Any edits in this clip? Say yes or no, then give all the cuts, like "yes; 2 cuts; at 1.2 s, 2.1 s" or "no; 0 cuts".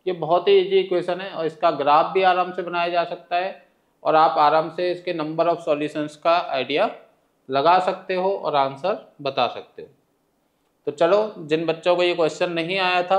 no; 0 cuts